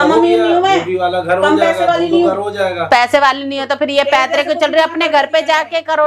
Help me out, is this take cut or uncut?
uncut